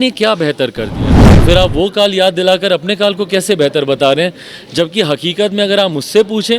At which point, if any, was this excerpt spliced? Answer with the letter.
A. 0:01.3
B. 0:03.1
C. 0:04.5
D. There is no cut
A